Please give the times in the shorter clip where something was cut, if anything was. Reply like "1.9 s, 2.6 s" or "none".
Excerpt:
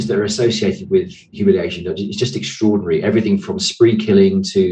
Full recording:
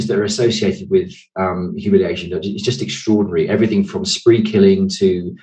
1.2 s